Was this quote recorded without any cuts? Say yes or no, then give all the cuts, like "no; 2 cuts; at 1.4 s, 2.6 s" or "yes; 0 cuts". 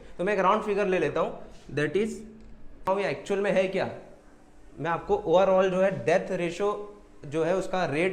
no; 1 cut; at 2.8 s